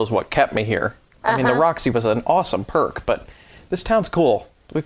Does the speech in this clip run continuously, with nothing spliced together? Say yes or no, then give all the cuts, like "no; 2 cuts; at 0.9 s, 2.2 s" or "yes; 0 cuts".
yes; 0 cuts